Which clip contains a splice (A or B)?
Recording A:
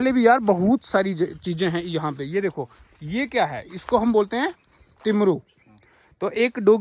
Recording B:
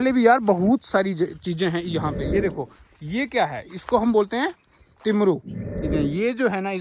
B